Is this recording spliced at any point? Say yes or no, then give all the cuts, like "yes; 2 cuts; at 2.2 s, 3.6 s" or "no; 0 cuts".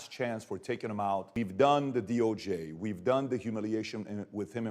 yes; 1 cut; at 1.3 s